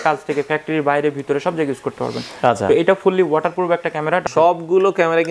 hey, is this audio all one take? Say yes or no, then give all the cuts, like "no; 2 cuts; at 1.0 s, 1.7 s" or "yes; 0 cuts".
no; 1 cut; at 4.2 s